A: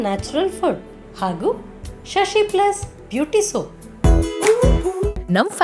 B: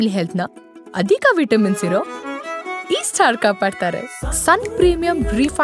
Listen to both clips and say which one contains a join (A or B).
A